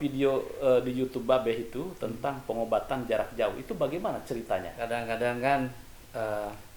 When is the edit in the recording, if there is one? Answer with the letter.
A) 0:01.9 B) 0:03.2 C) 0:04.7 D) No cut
C